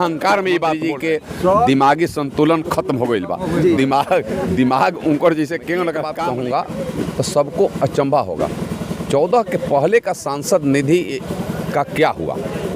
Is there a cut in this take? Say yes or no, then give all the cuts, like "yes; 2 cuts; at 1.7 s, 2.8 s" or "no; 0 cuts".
yes; 2 cuts; at 0.9 s, 6.1 s